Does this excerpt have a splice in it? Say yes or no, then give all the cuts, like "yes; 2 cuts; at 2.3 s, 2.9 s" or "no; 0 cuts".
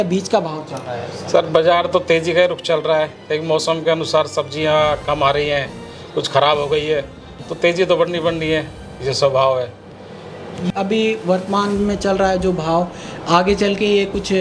yes; 1 cut; at 10.7 s